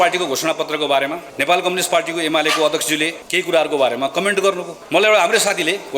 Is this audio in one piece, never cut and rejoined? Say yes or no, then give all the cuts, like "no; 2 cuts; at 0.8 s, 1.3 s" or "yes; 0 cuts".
no; 3 cuts; at 1.3 s, 3.2 s, 4.7 s